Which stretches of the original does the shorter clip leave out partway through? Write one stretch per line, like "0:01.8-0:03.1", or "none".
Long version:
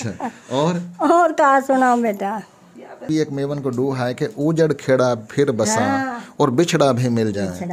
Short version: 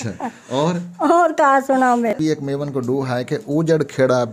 0:02.1-0:03.0